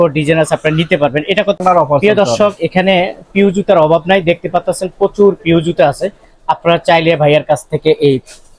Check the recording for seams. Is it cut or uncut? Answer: cut